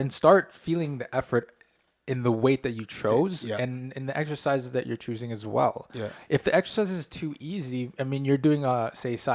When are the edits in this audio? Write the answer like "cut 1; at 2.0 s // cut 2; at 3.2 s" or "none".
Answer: none